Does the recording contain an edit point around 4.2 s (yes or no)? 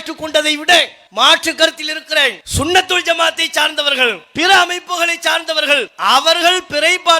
yes